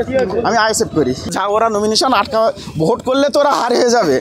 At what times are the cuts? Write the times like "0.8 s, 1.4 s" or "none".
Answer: 1.3 s

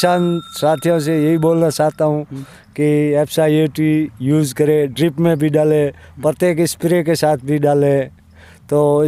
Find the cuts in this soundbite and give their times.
none

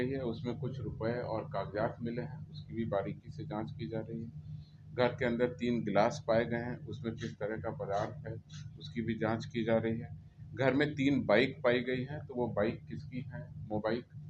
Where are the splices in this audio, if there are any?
none

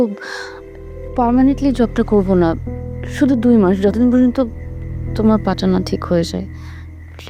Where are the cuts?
none

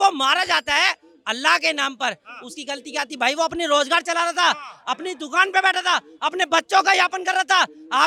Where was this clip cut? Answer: none

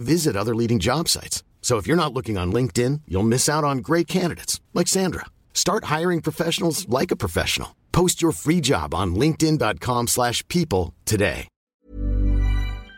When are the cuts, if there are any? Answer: 11.8 s

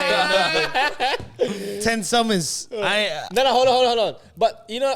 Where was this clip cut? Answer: none

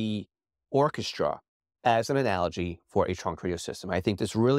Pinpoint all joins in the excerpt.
none

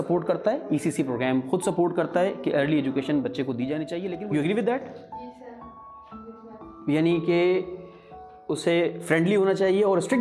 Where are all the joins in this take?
4.1 s

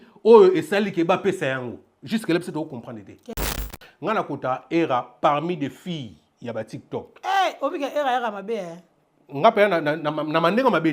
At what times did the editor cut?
3.7 s

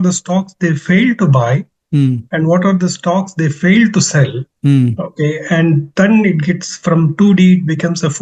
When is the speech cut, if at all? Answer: none

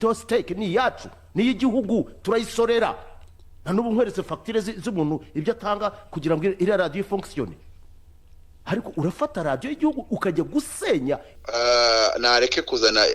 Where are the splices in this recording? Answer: 11.3 s

